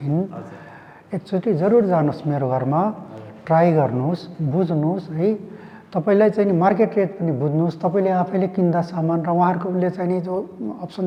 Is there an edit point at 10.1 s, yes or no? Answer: no